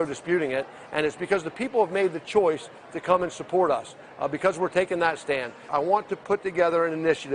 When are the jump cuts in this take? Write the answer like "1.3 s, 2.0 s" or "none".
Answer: 5.6 s